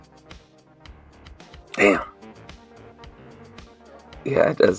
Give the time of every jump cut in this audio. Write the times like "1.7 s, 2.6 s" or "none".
none